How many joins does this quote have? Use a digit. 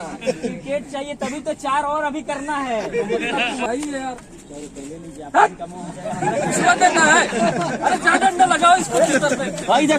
1